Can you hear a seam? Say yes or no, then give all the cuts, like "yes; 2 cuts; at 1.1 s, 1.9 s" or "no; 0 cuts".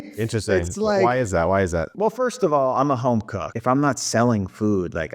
yes; 1 cut; at 3.4 s